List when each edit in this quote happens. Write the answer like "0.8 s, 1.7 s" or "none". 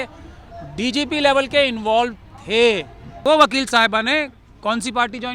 3.2 s